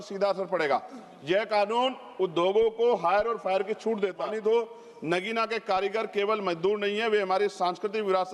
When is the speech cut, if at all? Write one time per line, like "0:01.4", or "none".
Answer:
0:04.2

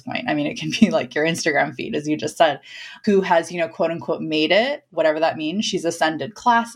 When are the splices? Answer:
0:02.9
0:04.9

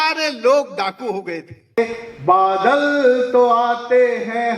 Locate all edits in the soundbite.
0:01.8

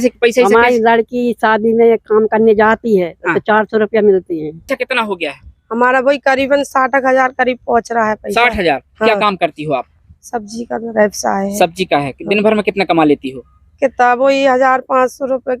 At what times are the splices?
0:04.7

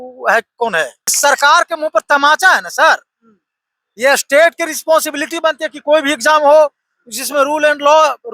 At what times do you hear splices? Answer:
0:01.2

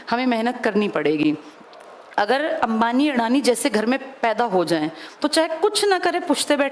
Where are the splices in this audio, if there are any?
none

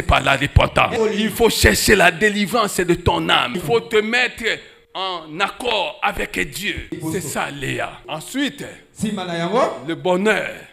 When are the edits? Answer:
0:00.9
0:03.5
0:07.0
0:08.1

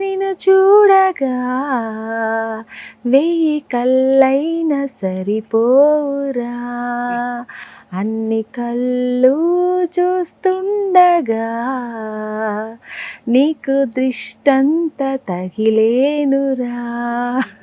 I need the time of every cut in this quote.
none

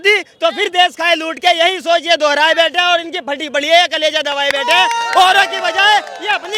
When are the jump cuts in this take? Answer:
none

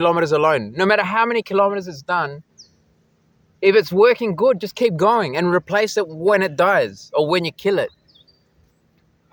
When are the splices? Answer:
none

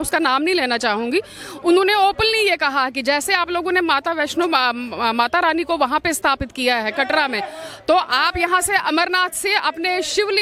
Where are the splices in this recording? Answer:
none

